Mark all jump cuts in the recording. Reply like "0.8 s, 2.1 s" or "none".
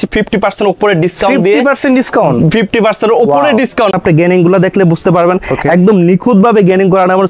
3.9 s

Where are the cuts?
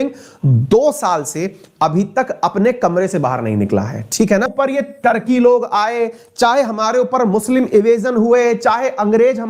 4.5 s

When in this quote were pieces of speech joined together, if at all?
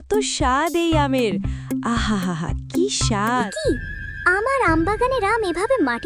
3.5 s

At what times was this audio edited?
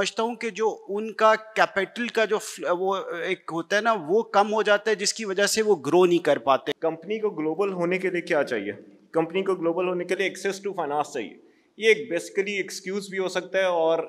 6.7 s

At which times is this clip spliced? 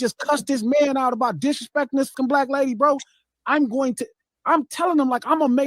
2.1 s

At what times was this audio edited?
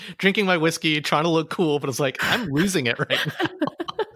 none

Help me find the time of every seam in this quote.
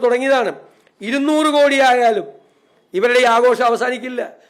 none

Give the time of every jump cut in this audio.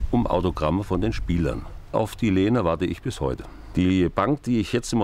1.9 s, 3.5 s

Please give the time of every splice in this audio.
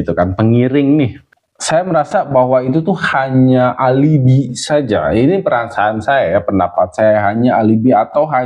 1.2 s

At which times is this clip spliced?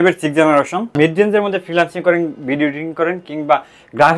0.9 s

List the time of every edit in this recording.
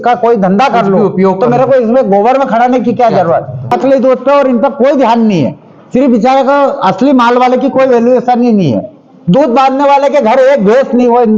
3.7 s

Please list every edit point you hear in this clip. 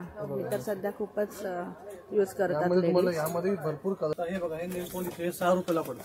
4.1 s

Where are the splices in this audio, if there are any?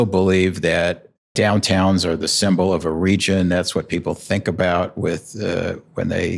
1.3 s

